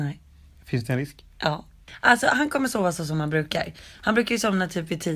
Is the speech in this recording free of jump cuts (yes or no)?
no